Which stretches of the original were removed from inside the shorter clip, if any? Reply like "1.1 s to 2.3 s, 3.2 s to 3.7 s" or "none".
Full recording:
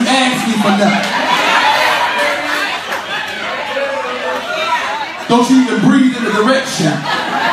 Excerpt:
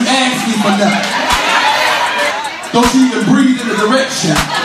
2.3 s to 4.9 s